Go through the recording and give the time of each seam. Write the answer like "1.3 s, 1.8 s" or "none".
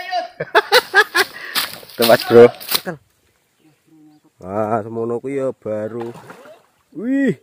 2.8 s

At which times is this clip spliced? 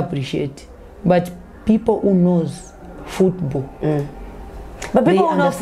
none

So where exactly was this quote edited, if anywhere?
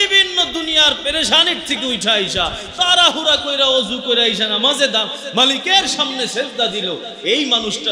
none

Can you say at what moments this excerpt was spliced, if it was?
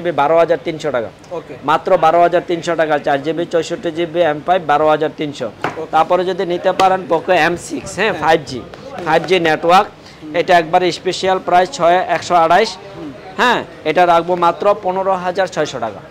none

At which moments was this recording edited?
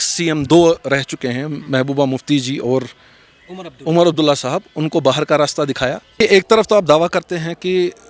6.2 s

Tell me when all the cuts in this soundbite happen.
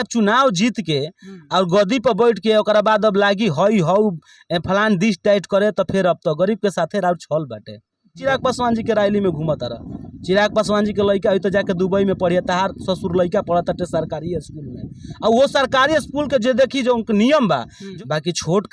8.2 s, 17.8 s

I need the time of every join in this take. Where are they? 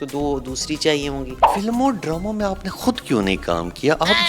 1.4 s

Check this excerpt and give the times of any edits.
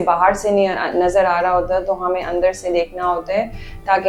none

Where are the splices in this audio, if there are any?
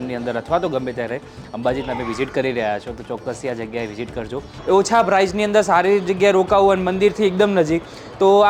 4.5 s

